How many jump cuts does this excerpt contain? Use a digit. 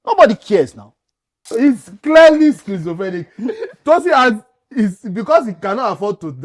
1